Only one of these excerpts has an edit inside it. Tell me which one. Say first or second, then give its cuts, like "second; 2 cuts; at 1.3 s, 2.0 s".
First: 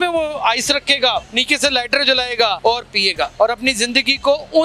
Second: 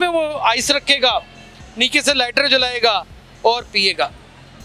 first; 2 cuts; at 1.3 s, 2.9 s